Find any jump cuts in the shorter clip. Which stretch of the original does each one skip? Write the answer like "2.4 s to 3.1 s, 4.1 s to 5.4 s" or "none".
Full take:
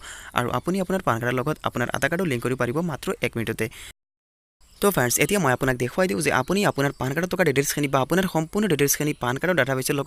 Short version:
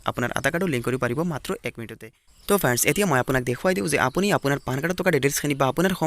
3.4 s to 4.1 s